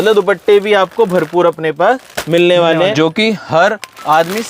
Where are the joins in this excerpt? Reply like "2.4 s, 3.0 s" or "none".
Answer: 2.9 s